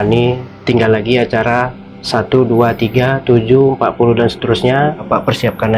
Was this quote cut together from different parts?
no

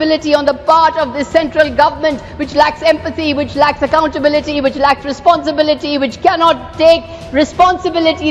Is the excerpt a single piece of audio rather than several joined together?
yes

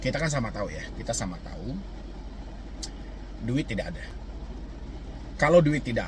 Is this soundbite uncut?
yes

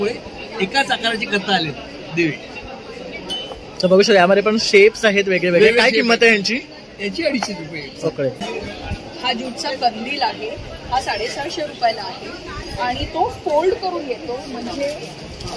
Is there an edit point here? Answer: yes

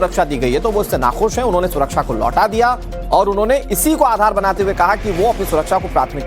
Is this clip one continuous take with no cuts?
no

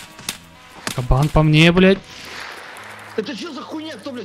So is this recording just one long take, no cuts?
yes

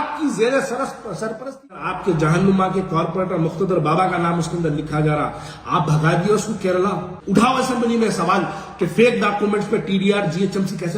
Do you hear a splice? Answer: yes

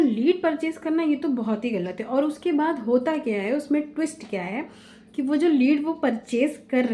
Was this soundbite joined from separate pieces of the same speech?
no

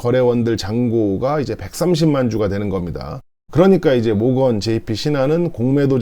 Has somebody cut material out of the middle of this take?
yes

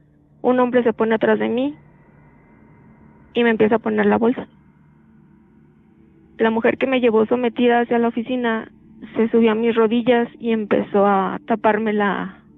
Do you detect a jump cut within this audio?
yes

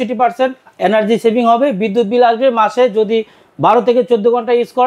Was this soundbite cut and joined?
no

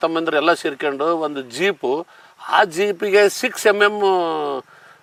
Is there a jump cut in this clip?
no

